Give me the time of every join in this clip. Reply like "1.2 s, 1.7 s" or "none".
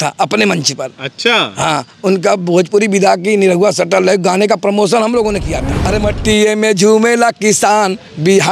5.7 s